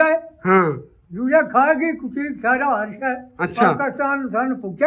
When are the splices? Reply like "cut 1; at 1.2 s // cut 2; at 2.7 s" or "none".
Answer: none

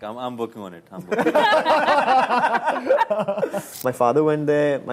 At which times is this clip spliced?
cut 1; at 3.7 s

